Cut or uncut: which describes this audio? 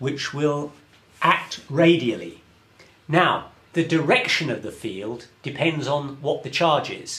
cut